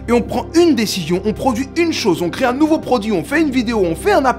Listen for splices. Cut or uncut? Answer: uncut